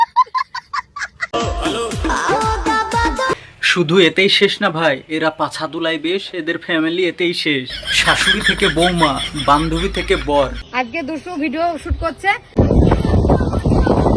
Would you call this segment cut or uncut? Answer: uncut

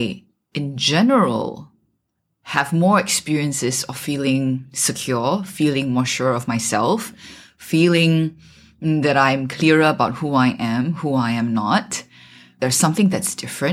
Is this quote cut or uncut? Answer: cut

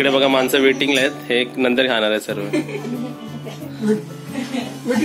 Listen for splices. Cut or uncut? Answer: uncut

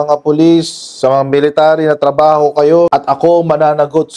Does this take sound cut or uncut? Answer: uncut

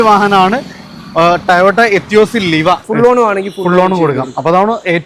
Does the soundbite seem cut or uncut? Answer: cut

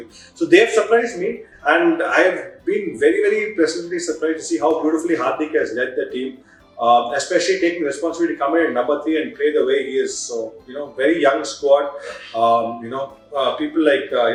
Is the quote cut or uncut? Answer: uncut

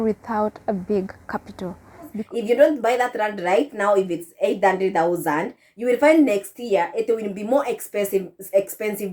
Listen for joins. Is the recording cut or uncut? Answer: cut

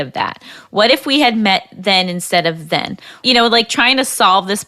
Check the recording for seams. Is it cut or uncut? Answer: cut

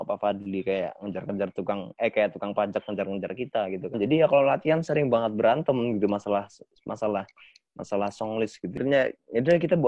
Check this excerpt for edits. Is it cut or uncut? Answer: cut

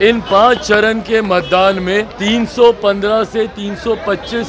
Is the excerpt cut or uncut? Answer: cut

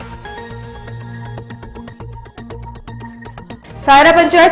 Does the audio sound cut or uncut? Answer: uncut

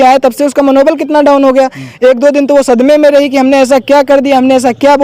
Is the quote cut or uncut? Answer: uncut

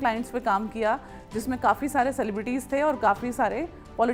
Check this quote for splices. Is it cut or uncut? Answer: uncut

